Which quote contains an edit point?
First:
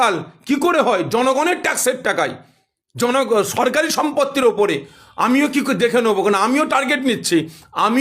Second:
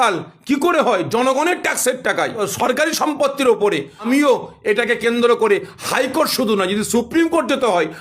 second; 2 cuts; at 2.4 s, 4.0 s

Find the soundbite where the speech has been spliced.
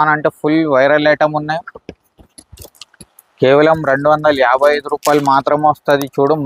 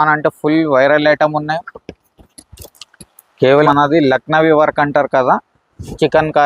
second; 1 cut; at 3.6 s

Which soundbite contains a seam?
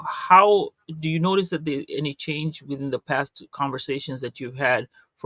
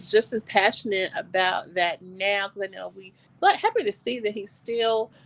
second; 1 cut; at 3.3 s

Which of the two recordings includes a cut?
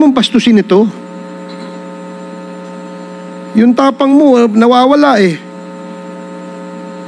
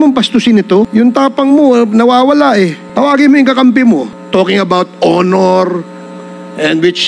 second; 3 cuts; at 0.9 s, 2.8 s, 4.2 s

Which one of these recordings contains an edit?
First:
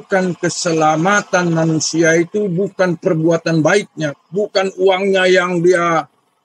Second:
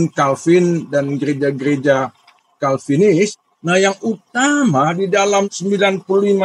second; 2 cuts; at 3.5 s, 5.5 s

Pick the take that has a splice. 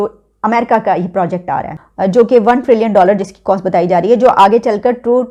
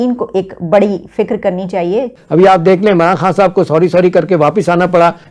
second; 1 cut; at 2.1 s

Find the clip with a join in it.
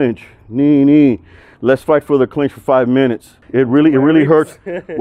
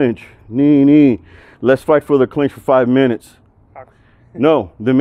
first; 1 cut; at 3.4 s

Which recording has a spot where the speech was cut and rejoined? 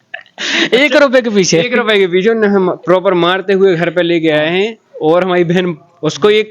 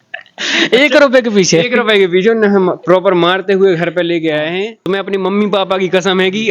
second; 1 cut; at 4.7 s

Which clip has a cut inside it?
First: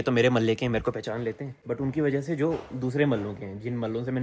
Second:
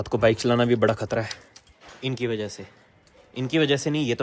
first; 1 cut; at 1.5 s

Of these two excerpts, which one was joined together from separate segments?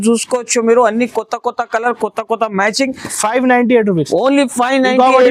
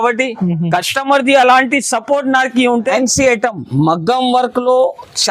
second; 1 cut; at 2.9 s

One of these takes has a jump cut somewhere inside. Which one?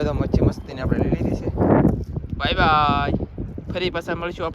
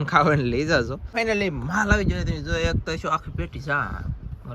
second; 1 cut; at 1.1 s

